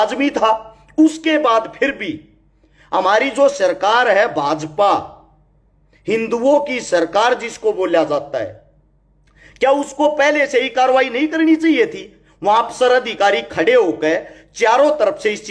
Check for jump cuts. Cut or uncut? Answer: uncut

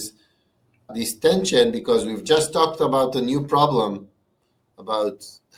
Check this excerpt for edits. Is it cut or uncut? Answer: uncut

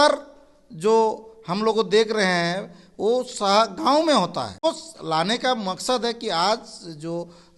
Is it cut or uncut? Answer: cut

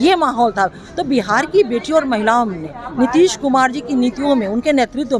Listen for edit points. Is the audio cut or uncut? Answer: uncut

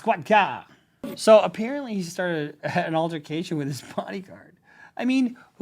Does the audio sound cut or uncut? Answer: cut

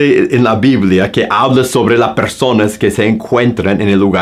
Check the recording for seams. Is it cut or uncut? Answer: uncut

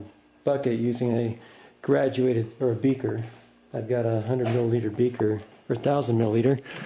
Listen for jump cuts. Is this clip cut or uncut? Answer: cut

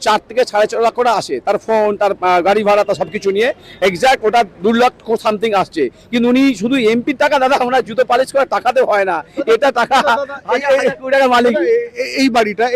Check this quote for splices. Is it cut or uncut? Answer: uncut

